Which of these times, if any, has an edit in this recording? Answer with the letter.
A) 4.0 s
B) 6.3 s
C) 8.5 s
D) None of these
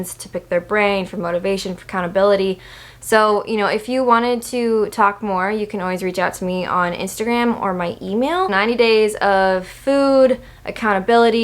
C